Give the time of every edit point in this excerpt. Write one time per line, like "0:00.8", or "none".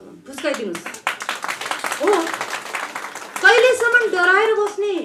none